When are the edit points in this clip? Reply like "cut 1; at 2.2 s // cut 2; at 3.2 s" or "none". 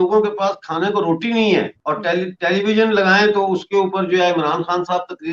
none